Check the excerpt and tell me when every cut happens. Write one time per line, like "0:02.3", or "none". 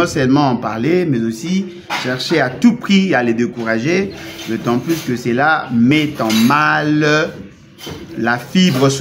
none